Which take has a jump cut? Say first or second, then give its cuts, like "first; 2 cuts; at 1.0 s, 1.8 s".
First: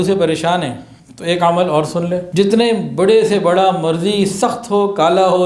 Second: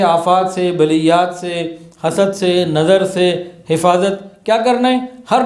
first; 1 cut; at 2.3 s